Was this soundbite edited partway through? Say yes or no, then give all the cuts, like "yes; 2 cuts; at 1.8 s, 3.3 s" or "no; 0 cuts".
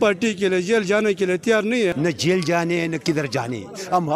yes; 1 cut; at 1.9 s